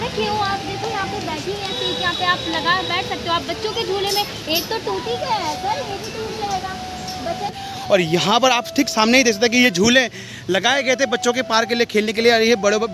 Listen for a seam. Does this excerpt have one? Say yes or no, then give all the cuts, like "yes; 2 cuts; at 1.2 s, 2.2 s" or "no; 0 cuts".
yes; 1 cut; at 7.7 s